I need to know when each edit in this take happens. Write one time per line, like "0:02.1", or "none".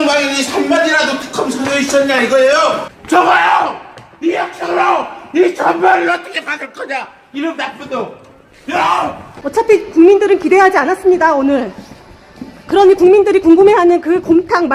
0:02.9
0:09.3